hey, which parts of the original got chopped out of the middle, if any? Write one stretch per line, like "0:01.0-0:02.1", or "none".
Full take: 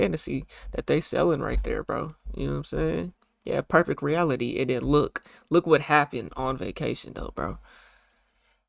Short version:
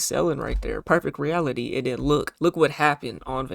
0:01.8-0:03.7
0:05.1-0:05.4